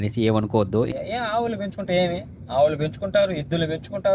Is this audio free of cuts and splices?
no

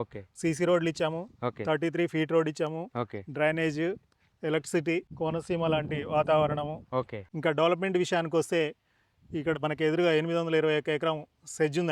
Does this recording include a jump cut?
yes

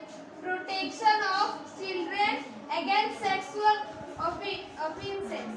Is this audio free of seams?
yes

